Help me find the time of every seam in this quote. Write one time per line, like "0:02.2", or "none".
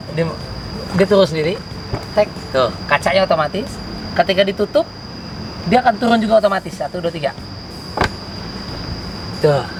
none